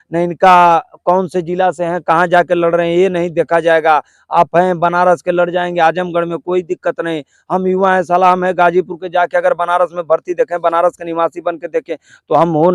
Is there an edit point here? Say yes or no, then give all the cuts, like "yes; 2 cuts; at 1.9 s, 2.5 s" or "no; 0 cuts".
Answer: no; 0 cuts